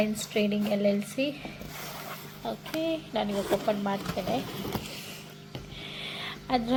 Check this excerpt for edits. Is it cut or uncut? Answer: uncut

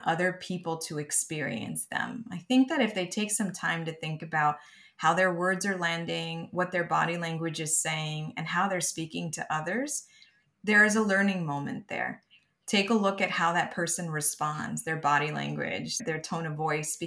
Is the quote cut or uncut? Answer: cut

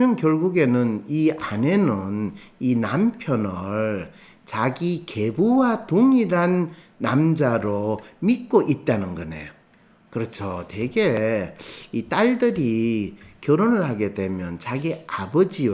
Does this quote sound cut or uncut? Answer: uncut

